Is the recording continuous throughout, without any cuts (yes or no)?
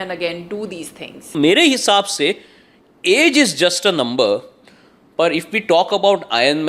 no